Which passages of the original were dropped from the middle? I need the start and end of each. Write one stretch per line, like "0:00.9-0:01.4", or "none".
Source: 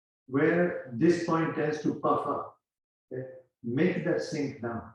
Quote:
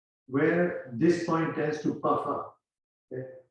none